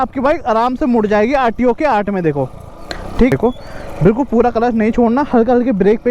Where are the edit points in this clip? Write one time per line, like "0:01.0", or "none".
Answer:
0:03.3